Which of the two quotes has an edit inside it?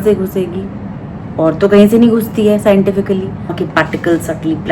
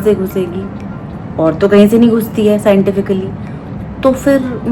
first; 1 cut; at 3.6 s

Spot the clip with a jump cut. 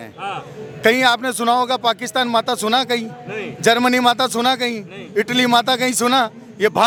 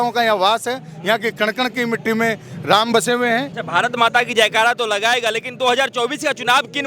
second; 1 cut; at 3.6 s

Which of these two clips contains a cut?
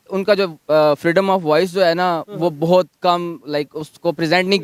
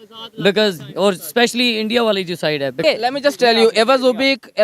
second; 1 cut; at 2.8 s

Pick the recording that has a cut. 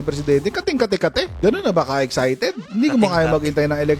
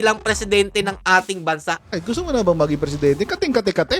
second; 1 cut; at 1.8 s

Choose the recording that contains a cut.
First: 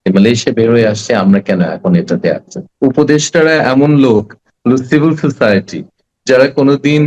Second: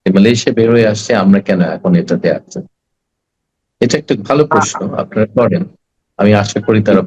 first; 1 cut; at 2.6 s

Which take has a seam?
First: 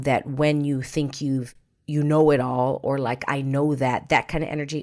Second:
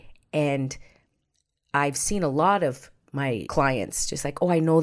second; 1 cut; at 3.5 s

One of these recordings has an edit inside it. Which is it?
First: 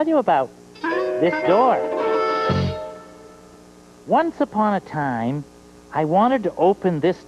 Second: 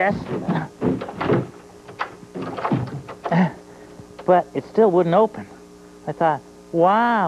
second; 1 cut; at 5.9 s

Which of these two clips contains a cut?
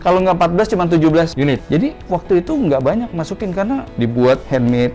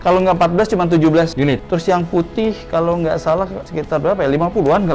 first; 2 cuts; at 1.6 s, 3.9 s

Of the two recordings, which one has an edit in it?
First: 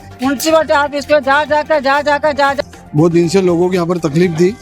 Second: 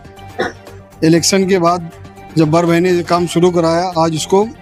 first; 1 cut; at 2.6 s

